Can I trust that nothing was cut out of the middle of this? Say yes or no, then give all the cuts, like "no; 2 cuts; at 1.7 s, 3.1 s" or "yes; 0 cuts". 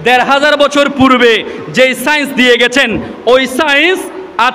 yes; 0 cuts